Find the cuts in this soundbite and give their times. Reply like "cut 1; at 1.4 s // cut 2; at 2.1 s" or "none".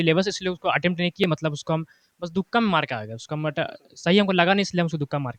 none